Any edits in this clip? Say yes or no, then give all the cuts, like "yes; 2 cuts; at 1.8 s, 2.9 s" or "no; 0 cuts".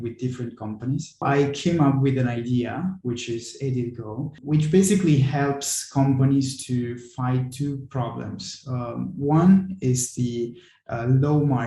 yes; 2 cuts; at 1.2 s, 4.4 s